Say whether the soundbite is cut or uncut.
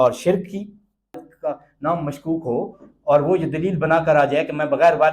cut